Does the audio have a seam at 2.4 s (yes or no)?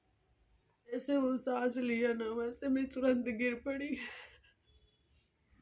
no